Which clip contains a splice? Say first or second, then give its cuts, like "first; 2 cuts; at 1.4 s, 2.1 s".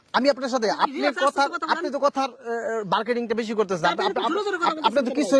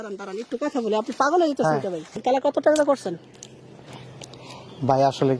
second; 1 cut; at 2.1 s